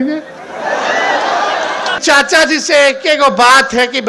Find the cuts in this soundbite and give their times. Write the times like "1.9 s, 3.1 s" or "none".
2.0 s